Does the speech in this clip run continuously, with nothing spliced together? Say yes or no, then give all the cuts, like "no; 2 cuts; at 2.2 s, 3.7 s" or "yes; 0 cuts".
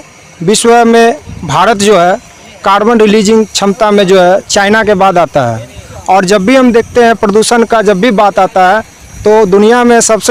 yes; 0 cuts